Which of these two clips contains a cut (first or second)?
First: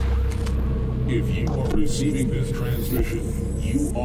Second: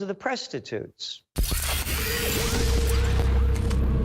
second